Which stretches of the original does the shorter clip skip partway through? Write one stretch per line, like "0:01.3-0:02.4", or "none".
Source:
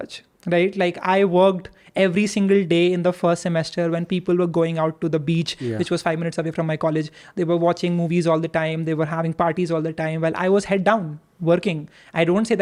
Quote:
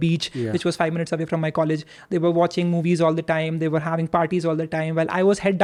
none